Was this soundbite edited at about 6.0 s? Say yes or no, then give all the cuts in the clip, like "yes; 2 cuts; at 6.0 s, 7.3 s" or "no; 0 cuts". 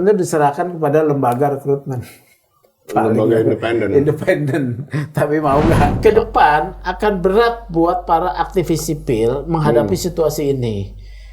yes; 1 cut; at 6.0 s